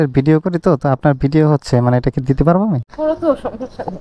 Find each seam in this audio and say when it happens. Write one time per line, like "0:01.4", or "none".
none